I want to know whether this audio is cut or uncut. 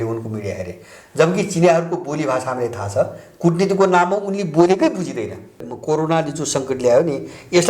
cut